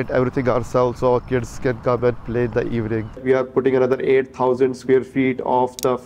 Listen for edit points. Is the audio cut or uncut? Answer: cut